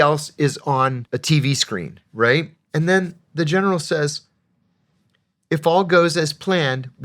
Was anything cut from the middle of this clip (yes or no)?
yes